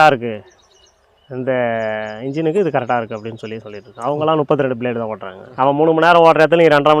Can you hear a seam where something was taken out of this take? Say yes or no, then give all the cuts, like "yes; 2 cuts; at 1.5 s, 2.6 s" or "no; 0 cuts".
yes; 1 cut; at 5.5 s